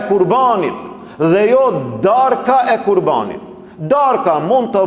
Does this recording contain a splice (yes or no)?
no